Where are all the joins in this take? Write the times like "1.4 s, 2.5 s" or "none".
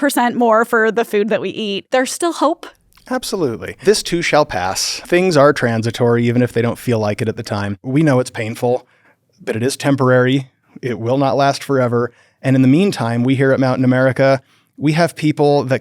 1.8 s, 3.8 s, 5.0 s, 7.8 s